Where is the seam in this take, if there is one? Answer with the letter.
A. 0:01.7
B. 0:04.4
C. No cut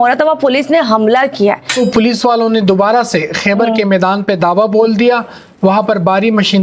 A